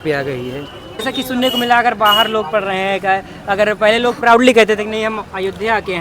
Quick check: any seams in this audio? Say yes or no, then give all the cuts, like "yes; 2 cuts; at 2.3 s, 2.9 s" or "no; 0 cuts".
yes; 1 cut; at 1.1 s